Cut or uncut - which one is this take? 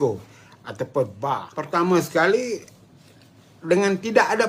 cut